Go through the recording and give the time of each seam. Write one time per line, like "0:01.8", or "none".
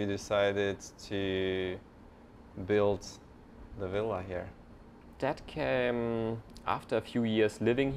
none